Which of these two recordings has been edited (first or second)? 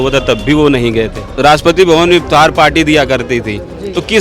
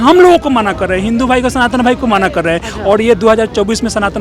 first